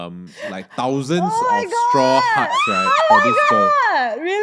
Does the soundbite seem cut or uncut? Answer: uncut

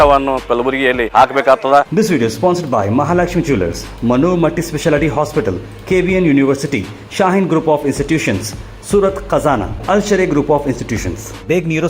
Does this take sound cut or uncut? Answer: cut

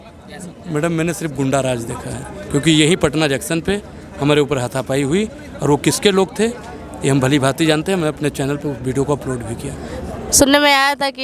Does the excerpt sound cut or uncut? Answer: uncut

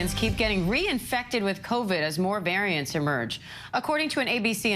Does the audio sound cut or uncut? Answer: cut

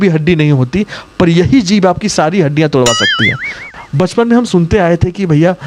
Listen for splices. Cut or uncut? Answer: cut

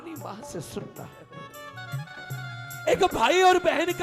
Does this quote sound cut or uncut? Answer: cut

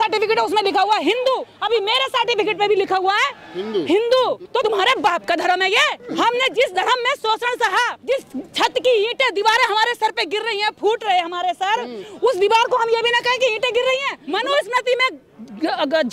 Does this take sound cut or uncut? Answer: cut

